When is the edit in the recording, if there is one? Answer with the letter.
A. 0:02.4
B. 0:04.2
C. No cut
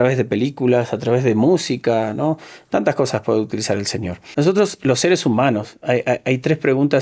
B